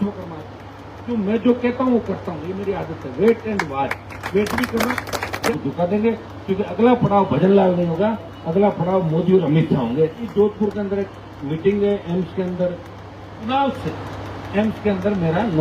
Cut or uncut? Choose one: cut